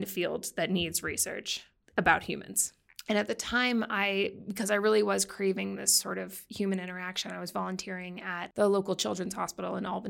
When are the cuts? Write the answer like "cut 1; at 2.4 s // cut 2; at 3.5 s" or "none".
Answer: cut 1; at 8.5 s